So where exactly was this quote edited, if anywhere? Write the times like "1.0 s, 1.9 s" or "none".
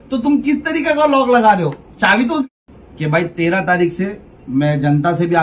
2.5 s